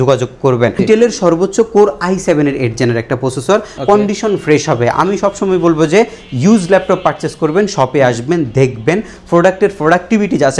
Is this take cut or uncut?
cut